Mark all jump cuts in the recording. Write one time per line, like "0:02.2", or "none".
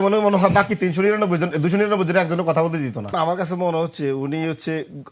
0:03.0